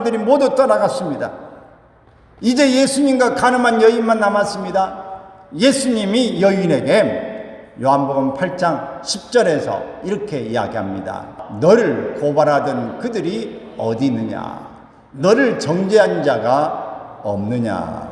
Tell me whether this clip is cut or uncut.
cut